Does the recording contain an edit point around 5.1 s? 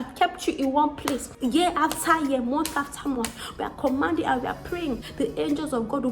yes; 2 cuts; at 1.3 s, 5.1 s

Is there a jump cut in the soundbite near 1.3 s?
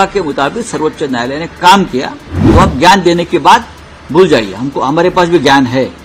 no; 0 cuts

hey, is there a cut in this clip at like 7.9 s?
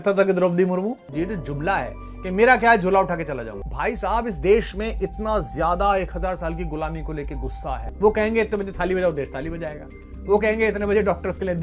yes; 3 cuts; at 1.0 s, 3.6 s, 7.9 s

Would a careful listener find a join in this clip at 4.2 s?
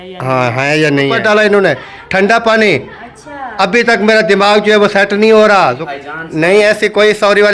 no; 2 cuts; at 1.2 s, 5.8 s

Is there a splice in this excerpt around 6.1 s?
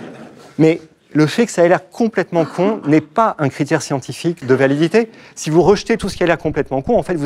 no; 1 cut; at 4.4 s

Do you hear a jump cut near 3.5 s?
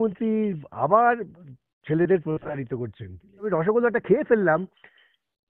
yes; 1 cut; at 3.5 s

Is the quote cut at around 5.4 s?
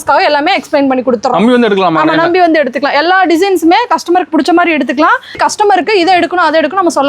yes; 1 cut; at 5.4 s

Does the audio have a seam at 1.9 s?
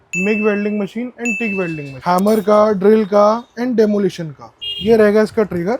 yes; 1 cut; at 1.9 s

